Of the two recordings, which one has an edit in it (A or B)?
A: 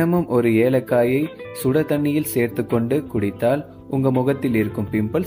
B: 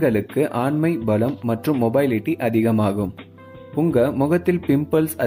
A